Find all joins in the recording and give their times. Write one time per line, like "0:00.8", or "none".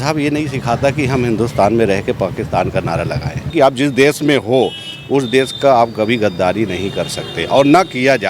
0:03.5